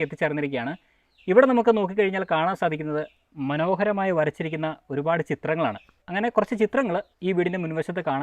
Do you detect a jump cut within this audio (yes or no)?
yes